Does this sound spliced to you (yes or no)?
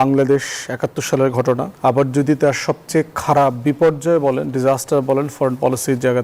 yes